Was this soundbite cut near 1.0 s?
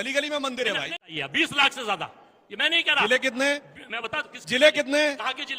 yes; 1 cut; at 1.0 s

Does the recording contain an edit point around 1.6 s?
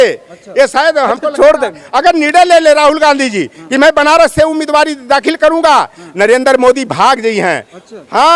no; 0 cuts

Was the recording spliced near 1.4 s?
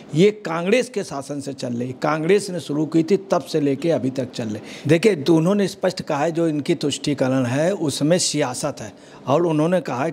no; 1 cut; at 4.7 s

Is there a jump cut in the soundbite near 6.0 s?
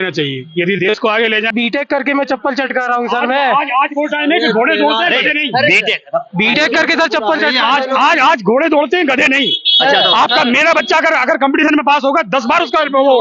no; 1 cut; at 1.5 s

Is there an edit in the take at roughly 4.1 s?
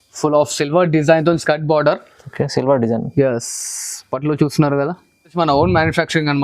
no; 1 cut; at 5.3 s

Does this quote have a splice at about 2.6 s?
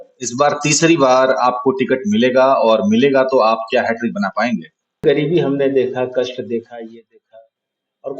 no; 1 cut; at 5.0 s

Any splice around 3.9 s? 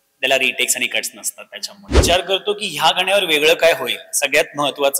no; 1 cut; at 2.0 s

